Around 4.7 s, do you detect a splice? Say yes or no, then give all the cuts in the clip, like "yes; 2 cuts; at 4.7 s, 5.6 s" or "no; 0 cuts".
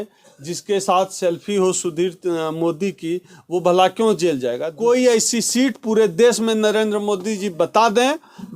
yes; 1 cut; at 4.7 s